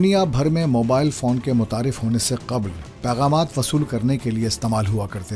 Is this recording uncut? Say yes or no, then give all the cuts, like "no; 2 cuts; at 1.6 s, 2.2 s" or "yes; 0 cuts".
yes; 0 cuts